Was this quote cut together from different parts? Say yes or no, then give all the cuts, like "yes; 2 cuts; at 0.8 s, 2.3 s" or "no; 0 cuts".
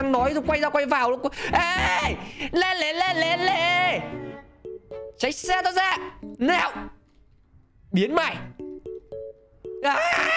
no; 0 cuts